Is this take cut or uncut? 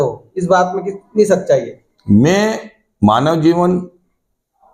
uncut